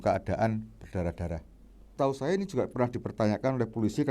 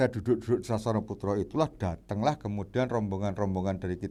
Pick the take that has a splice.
first; 1 cut; at 1.9 s

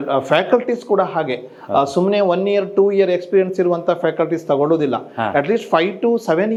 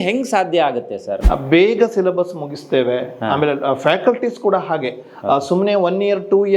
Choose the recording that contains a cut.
second; 1 cut; at 1.2 s

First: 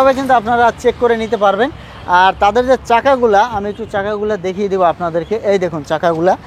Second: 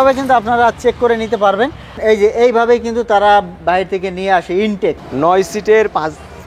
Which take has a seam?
second; 2 cuts; at 2.0 s, 5.1 s

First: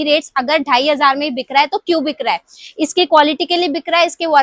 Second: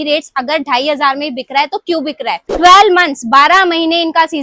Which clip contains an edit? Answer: second; 1 cut; at 2.4 s

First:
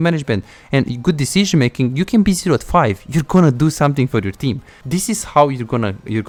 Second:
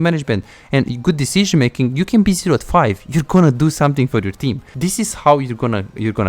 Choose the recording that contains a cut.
second; 1 cut; at 4.7 s

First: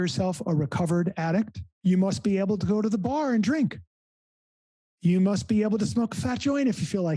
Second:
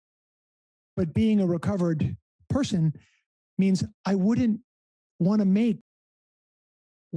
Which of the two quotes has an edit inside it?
first; 1 cut; at 1.6 s

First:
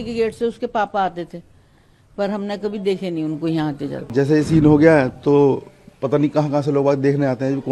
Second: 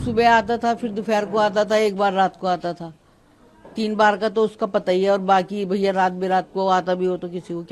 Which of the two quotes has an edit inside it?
first; 1 cut; at 4.1 s

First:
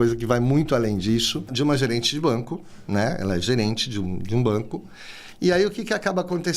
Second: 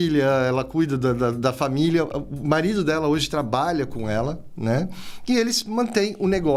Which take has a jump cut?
first; 1 cut; at 1.5 s

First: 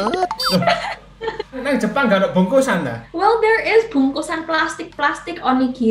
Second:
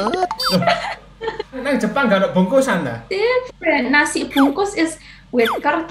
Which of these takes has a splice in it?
second; 1 cut; at 3.0 s

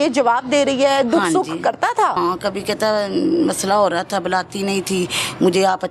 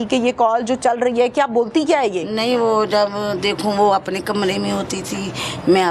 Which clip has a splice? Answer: first; 1 cut; at 2.2 s

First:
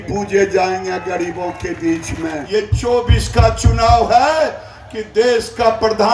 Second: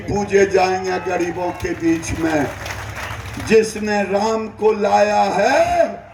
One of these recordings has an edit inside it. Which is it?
first; 1 cut; at 2.7 s

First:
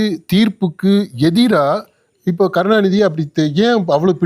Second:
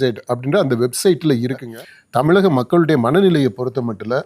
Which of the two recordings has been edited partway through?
second; 1 cut; at 1.6 s

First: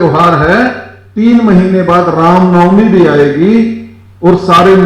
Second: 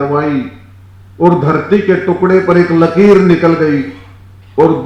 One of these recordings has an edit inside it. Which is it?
first; 1 cut; at 1.0 s

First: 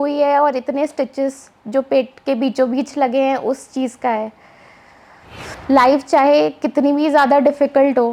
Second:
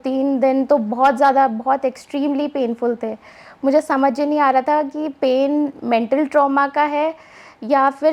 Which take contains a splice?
first; 1 cut; at 5.5 s

